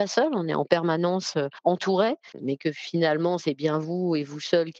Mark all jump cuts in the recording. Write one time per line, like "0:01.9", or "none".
0:01.5
0:02.3